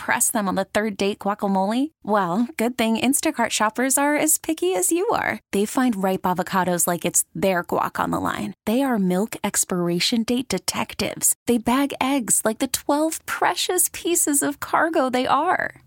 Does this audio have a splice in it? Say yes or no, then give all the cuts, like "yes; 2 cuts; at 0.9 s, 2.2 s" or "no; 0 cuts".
no; 0 cuts